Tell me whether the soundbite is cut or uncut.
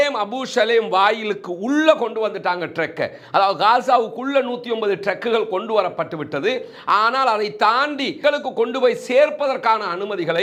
uncut